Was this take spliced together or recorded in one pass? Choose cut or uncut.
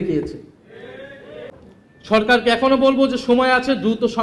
cut